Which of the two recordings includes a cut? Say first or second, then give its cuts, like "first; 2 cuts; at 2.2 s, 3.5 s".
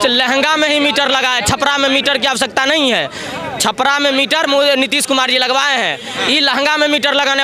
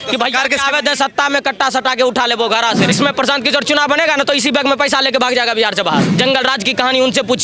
second; 2 cuts; at 2.9 s, 6.1 s